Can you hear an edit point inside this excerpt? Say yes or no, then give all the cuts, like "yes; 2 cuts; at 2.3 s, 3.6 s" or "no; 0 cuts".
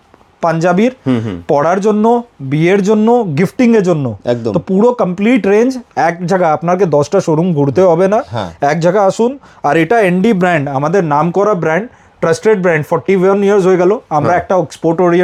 no; 0 cuts